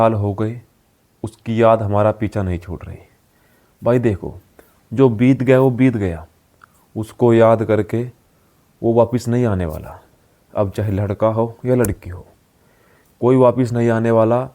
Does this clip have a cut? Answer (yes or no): no